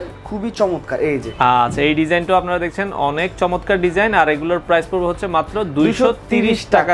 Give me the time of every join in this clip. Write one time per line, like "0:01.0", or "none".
none